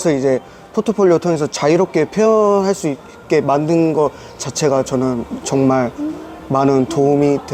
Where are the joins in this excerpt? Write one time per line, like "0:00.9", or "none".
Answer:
none